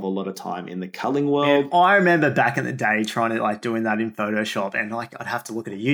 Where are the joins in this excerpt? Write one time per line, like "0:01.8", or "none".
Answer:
0:01.7